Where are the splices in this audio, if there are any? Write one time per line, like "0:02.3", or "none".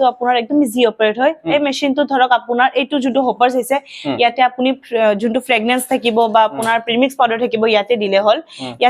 none